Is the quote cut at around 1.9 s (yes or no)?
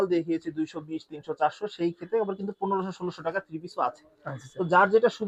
no